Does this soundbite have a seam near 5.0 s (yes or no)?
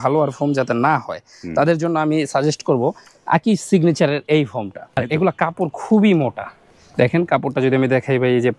yes